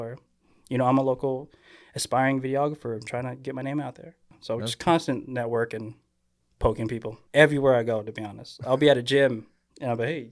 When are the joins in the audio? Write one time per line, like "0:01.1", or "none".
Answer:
0:04.3
0:07.2